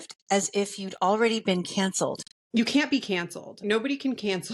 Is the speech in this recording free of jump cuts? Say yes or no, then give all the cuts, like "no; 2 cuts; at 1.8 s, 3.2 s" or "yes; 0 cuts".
no; 2 cuts; at 2.3 s, 3.6 s